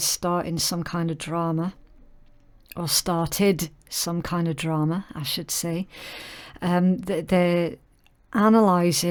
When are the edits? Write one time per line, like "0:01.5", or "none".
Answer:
none